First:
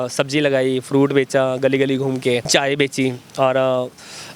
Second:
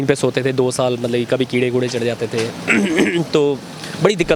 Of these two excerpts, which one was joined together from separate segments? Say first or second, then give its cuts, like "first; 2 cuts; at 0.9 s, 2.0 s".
first; 1 cut; at 2.5 s